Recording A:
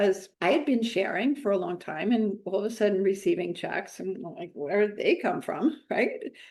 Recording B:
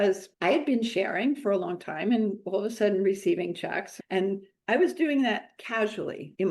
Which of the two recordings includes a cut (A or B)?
B